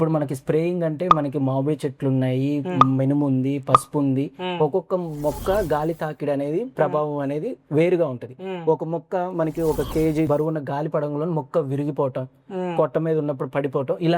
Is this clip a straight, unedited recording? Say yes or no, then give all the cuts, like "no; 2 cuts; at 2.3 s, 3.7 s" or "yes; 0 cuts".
no; 1 cut; at 10.3 s